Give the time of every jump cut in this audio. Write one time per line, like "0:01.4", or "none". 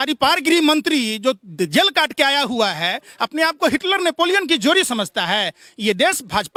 none